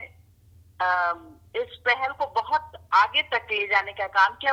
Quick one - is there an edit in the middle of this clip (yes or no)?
no